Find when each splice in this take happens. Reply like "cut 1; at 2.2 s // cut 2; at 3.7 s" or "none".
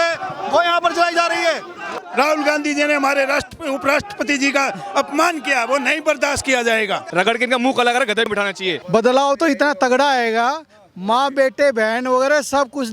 cut 1; at 1.9 s // cut 2; at 7.1 s // cut 3; at 8.3 s